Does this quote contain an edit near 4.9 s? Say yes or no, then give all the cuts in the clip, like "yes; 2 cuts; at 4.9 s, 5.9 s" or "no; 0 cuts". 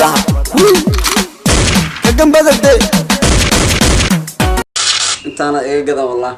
yes; 2 cuts; at 3.5 s, 4.9 s